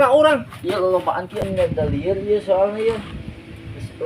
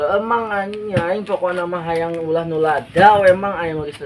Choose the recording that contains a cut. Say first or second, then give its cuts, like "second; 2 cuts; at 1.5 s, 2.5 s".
first; 1 cut; at 1.4 s